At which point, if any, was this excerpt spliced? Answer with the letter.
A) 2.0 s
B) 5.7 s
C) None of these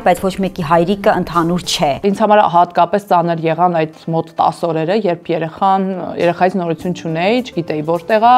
A